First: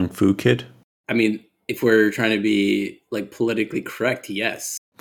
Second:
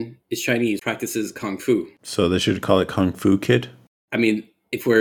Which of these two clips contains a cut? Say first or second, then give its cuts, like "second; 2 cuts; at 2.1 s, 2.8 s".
second; 2 cuts; at 0.8 s, 2.0 s